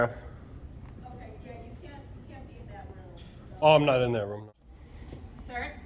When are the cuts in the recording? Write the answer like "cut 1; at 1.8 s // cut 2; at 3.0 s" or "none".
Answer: cut 1; at 4.3 s